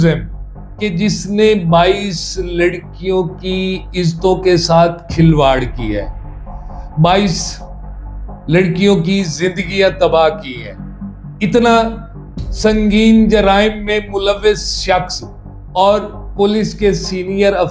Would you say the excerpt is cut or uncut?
uncut